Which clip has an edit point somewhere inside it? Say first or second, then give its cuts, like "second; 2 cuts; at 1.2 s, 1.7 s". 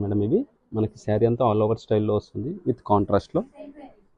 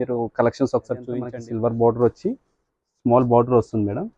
second; 1 cut; at 1.3 s